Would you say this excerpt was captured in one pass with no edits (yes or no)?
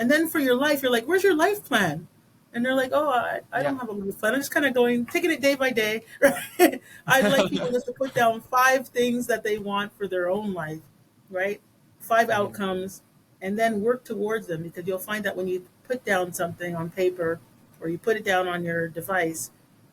yes